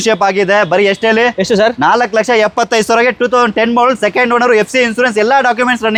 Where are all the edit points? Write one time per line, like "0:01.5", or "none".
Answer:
none